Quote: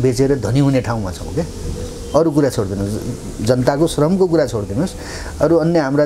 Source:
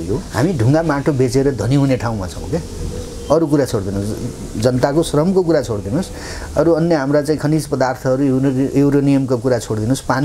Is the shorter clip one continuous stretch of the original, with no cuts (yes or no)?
yes